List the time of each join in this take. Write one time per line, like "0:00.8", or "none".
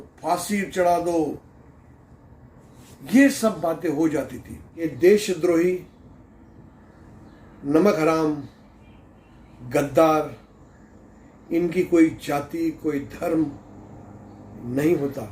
0:04.8

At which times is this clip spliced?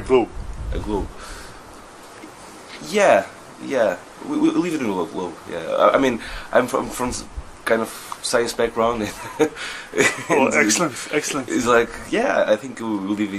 0:06.0

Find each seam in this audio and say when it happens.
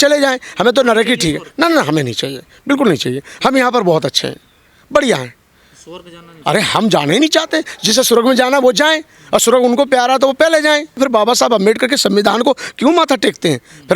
0:11.0

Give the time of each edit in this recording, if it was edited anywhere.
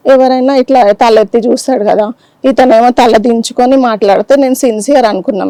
none

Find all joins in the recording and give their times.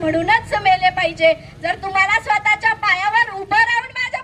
none

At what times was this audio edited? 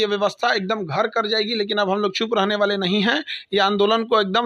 none

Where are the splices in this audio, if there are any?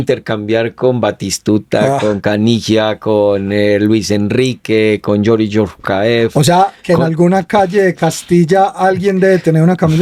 none

